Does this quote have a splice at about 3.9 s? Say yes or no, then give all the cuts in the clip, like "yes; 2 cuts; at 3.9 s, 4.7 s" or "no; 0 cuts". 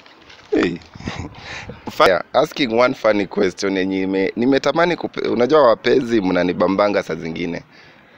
no; 1 cut; at 2.1 s